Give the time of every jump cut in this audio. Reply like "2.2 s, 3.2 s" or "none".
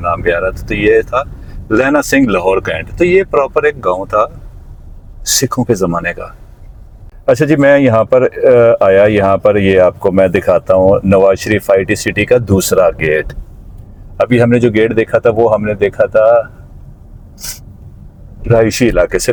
none